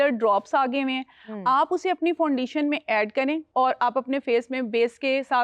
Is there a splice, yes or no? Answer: yes